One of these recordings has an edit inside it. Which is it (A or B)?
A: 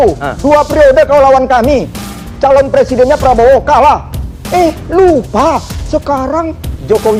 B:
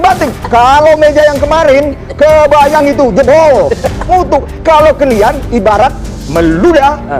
B